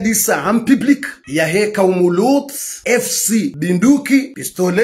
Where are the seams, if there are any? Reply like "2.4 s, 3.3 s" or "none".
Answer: none